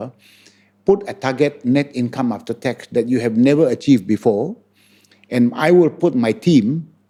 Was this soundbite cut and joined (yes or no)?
no